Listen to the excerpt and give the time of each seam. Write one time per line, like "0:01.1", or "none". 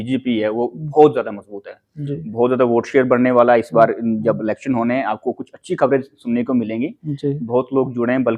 none